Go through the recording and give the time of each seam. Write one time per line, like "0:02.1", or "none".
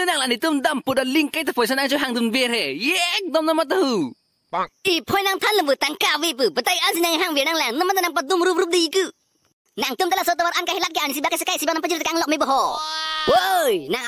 0:12.9